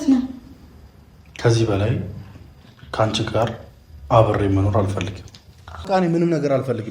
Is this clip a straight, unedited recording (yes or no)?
no